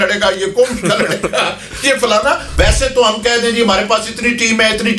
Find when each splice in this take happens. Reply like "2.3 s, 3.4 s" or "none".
2.5 s